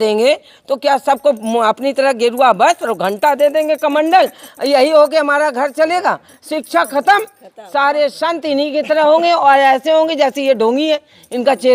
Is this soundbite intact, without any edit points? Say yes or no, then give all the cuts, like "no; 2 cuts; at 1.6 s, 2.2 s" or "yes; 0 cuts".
yes; 0 cuts